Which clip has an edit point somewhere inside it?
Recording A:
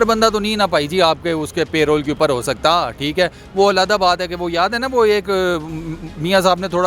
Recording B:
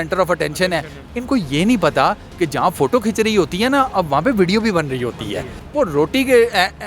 B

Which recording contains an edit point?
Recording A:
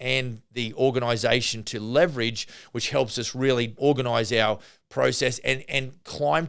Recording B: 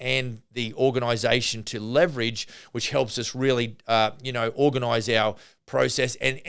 A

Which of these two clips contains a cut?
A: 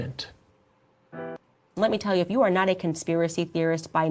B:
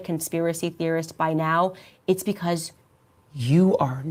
A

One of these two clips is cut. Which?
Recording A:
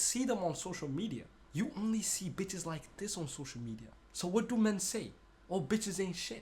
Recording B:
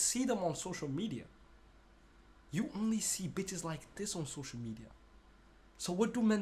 A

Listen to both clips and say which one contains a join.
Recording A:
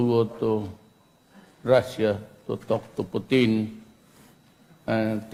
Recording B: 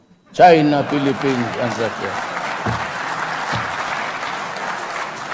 B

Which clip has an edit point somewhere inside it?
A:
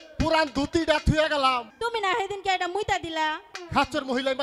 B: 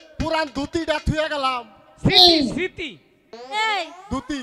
A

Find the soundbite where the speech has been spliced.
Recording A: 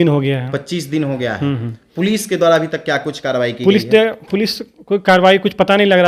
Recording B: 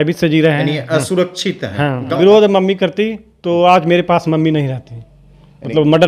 B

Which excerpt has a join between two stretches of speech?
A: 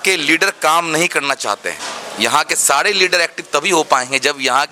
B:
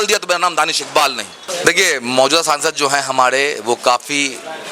B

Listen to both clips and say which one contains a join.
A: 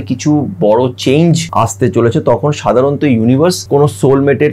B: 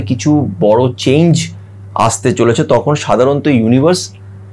A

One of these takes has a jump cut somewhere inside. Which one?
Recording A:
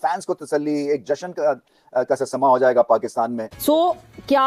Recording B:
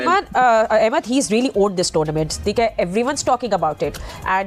A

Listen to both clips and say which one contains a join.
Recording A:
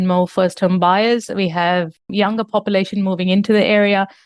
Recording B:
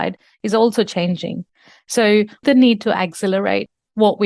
B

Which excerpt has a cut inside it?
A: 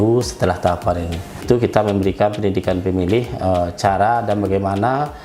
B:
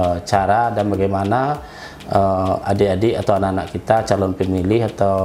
A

